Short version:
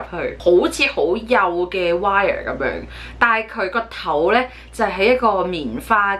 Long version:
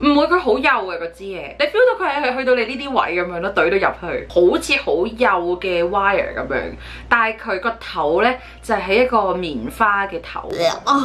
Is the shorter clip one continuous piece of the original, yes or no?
yes